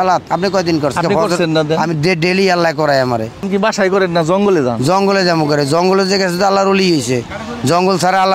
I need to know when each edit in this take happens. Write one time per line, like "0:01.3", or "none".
0:01.0
0:03.5